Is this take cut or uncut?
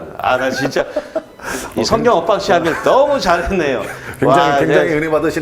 cut